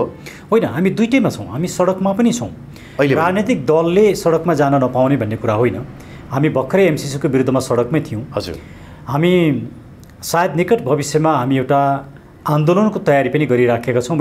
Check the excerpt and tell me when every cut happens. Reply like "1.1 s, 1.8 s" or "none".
none

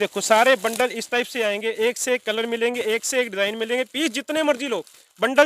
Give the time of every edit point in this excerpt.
none

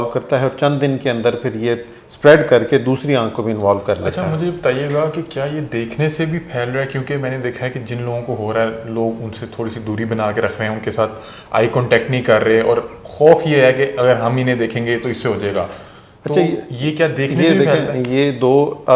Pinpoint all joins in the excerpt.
none

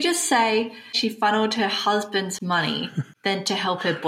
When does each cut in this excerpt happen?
1.0 s, 3.0 s

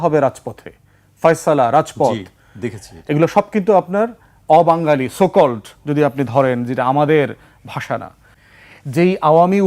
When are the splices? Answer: 8.3 s

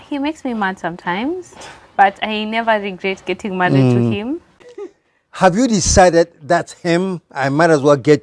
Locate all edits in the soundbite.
4.8 s

